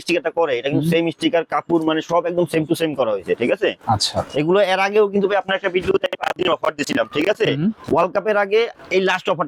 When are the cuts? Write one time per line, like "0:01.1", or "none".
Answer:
none